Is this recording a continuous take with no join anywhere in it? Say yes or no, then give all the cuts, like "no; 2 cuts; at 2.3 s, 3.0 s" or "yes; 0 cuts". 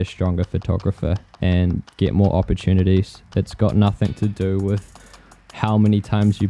yes; 0 cuts